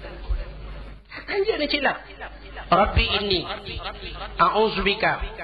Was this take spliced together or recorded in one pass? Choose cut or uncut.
cut